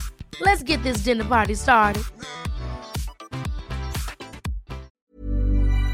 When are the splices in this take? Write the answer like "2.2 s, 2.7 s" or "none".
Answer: 4.9 s